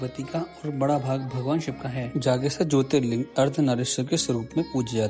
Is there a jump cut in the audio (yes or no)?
no